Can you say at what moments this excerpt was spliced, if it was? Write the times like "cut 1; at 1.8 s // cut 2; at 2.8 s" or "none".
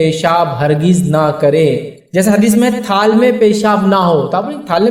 cut 1; at 2.0 s